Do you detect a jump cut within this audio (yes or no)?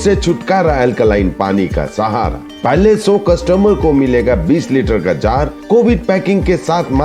no